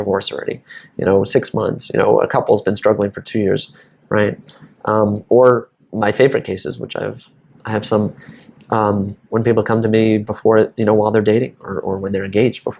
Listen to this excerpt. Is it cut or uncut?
uncut